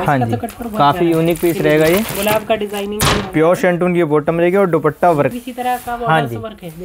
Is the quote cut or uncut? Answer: cut